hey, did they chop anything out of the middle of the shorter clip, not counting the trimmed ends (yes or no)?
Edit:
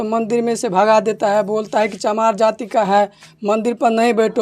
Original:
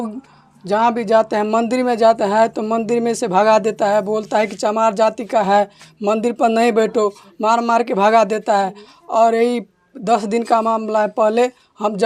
no